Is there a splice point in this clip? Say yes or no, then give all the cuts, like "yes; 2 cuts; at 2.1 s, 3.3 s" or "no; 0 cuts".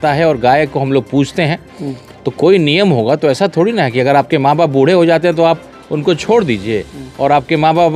no; 0 cuts